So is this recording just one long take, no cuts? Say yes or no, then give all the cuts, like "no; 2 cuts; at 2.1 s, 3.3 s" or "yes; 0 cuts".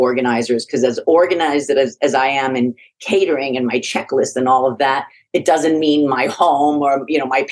yes; 0 cuts